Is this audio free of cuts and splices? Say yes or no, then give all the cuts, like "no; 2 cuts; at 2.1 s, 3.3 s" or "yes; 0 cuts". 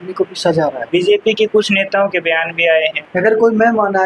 no; 2 cuts; at 0.8 s, 3.0 s